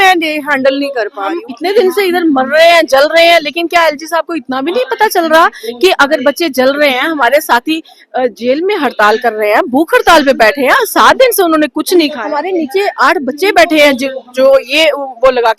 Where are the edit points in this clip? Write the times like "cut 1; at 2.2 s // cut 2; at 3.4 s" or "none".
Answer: cut 1; at 1.4 s // cut 2; at 12.2 s